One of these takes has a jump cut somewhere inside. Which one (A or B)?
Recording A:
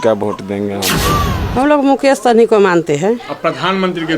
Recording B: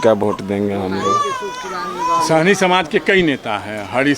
A